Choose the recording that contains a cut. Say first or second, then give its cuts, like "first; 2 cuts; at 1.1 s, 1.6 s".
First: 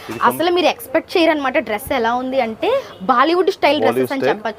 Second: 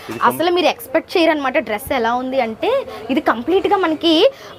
first; 1 cut; at 2.9 s